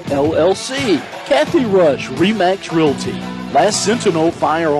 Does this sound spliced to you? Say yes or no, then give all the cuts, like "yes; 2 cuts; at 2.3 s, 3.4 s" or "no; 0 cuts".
yes; 1 cut; at 1.1 s